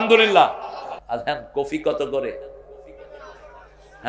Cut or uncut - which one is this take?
cut